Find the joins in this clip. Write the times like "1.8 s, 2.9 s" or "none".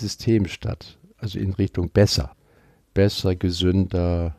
2.3 s